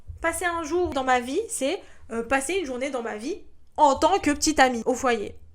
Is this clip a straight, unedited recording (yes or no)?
no